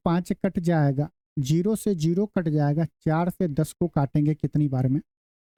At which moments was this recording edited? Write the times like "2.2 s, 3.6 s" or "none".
none